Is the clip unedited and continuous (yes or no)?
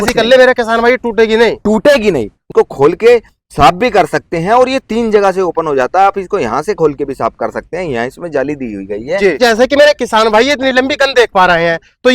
no